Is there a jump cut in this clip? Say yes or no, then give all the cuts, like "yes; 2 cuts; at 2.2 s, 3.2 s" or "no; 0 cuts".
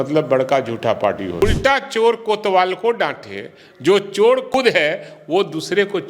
yes; 2 cuts; at 1.4 s, 4.5 s